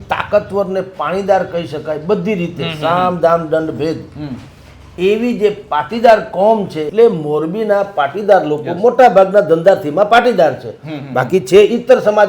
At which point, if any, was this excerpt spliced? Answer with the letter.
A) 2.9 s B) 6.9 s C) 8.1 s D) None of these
B